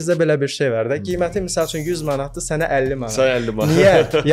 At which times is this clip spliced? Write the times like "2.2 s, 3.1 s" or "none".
none